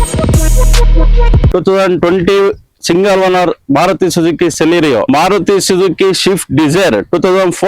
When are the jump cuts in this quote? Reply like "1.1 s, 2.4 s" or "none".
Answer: 1.4 s